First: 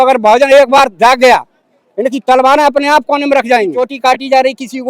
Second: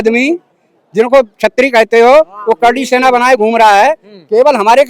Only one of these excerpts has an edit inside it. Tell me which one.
first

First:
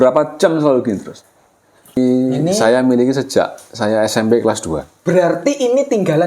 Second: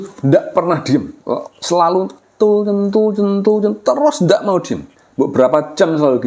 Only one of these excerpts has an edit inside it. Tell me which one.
first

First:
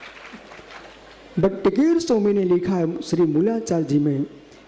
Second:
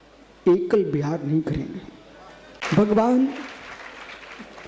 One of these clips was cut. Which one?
second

